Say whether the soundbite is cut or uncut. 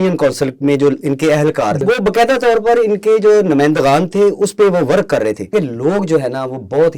cut